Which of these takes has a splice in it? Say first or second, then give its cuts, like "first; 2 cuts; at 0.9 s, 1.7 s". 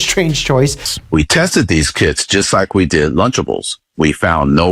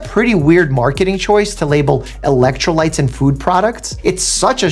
first; 1 cut; at 0.9 s